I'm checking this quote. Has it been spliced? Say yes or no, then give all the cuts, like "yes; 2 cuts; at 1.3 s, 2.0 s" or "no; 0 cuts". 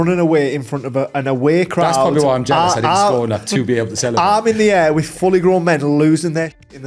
no; 0 cuts